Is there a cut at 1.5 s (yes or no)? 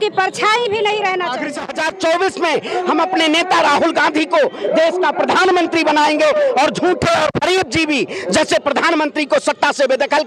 yes